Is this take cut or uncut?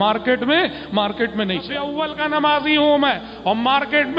cut